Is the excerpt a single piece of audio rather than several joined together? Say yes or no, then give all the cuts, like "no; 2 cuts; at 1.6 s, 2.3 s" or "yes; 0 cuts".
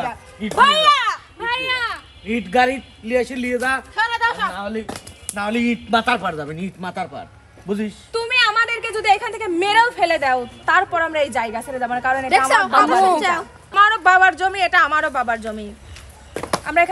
no; 1 cut; at 13.7 s